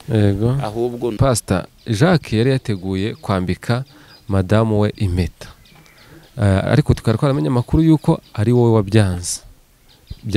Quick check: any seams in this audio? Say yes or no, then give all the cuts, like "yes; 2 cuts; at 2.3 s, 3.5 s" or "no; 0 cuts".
yes; 1 cut; at 1.1 s